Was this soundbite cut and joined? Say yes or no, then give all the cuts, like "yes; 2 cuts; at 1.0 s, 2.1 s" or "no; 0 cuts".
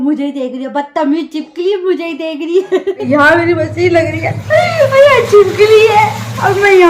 yes; 1 cut; at 3.1 s